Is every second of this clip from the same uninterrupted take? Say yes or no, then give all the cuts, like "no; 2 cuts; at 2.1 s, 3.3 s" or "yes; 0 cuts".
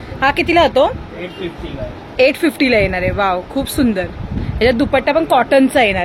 yes; 0 cuts